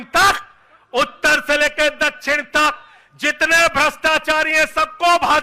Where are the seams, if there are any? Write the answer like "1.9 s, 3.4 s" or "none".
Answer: none